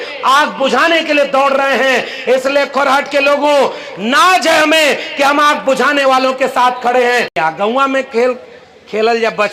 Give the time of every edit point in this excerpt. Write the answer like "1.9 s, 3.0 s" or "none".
7.3 s